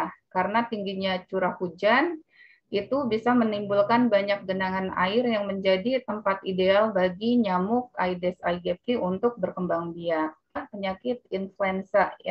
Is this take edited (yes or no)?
yes